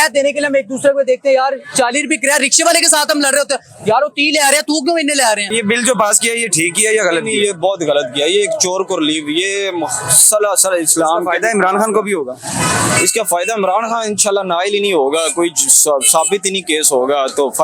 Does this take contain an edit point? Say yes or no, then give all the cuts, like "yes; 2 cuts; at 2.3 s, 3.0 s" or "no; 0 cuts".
yes; 1 cut; at 5.5 s